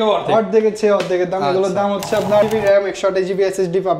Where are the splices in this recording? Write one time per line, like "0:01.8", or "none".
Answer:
0:02.4